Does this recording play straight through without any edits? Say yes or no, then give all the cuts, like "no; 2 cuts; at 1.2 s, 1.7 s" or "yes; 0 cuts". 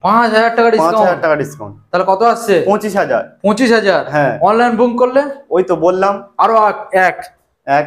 yes; 0 cuts